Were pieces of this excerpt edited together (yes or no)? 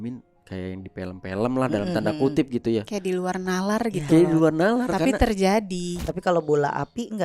yes